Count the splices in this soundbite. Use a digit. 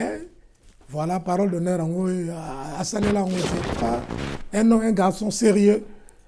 1